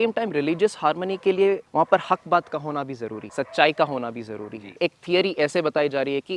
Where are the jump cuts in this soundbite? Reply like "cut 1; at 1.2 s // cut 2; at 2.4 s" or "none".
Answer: cut 1; at 1.7 s // cut 2; at 3.2 s // cut 3; at 4.8 s